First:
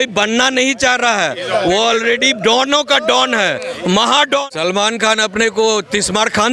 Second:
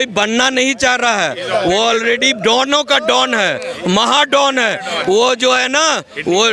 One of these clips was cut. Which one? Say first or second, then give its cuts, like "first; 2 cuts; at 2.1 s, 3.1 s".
first; 1 cut; at 4.3 s